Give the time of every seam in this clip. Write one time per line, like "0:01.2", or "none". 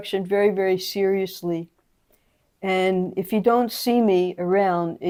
none